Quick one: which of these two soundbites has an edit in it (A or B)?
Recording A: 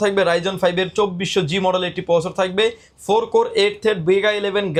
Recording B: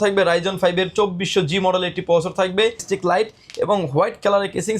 B